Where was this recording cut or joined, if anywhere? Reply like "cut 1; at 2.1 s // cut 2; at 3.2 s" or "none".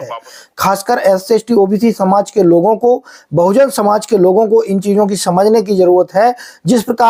none